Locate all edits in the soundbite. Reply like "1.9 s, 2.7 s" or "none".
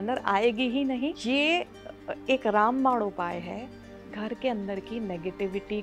1.2 s